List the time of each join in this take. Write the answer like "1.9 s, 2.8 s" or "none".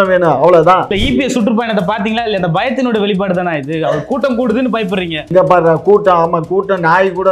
1.0 s